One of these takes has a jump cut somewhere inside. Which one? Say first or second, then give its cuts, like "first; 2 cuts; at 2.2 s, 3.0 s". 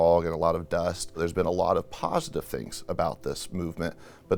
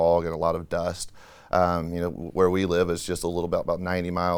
first; 1 cut; at 1.2 s